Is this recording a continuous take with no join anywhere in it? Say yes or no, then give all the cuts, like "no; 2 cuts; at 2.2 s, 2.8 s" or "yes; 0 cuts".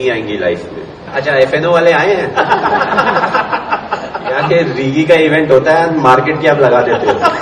no; 1 cut; at 1.0 s